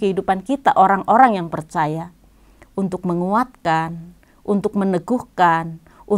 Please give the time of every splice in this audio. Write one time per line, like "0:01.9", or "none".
none